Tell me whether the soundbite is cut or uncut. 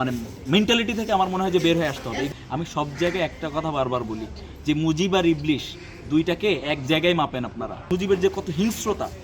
cut